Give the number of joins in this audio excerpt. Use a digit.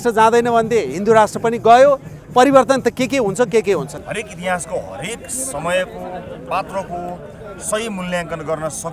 1